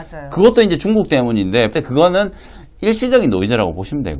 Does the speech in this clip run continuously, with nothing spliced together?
no; 1 cut; at 1.7 s

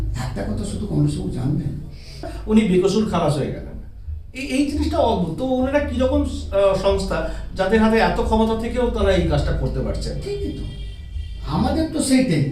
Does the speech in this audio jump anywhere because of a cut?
yes; 1 cut; at 2.3 s

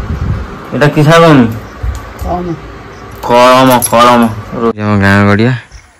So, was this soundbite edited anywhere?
yes; 1 cut; at 4.8 s

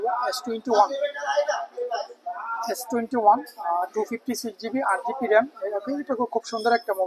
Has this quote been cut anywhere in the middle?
no; 0 cuts

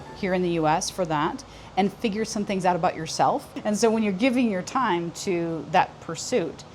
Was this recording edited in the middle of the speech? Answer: yes; 1 cut; at 3.5 s

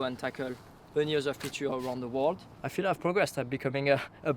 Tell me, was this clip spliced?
yes; 1 cut; at 2.6 s

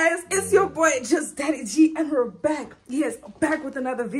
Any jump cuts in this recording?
no; 0 cuts

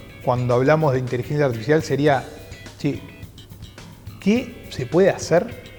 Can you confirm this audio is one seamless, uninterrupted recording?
yes; 0 cuts

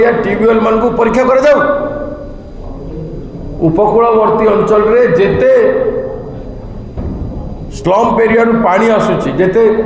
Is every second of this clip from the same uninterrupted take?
yes; 0 cuts

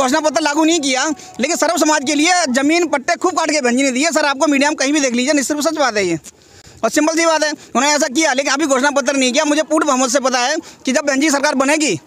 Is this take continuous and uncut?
yes; 0 cuts

